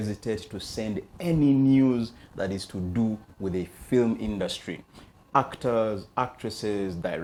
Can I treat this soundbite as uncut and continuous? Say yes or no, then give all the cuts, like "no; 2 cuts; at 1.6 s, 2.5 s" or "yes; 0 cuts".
yes; 0 cuts